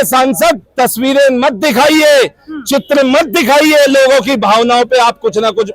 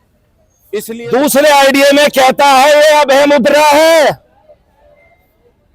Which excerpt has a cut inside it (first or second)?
second